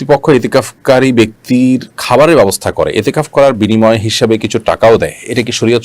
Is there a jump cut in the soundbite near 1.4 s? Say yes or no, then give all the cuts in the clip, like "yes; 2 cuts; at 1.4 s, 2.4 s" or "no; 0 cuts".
yes; 1 cut; at 1.4 s